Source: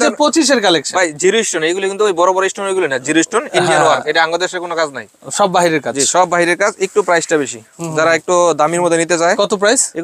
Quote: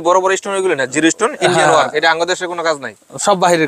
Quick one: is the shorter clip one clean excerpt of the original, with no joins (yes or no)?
yes